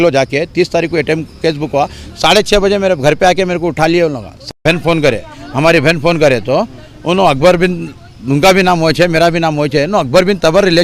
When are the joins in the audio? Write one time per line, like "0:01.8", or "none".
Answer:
0:04.5